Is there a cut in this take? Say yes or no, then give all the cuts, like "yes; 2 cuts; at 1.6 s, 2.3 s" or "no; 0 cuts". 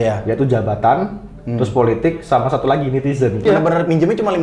yes; 1 cut; at 3.4 s